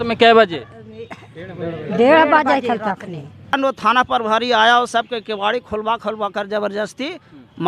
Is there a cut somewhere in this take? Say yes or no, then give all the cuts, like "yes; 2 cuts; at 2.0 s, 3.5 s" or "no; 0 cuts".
yes; 1 cut; at 3.5 s